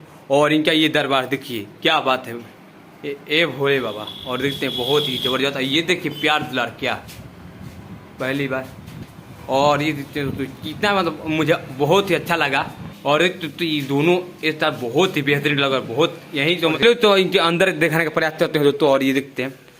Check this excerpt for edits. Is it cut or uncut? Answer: cut